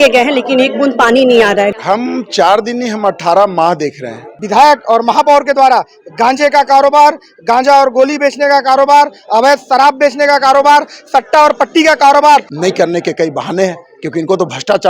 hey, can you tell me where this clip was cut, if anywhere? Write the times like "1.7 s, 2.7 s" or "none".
1.7 s, 4.4 s, 12.5 s